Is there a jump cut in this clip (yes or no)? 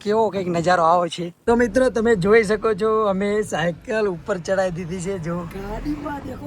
yes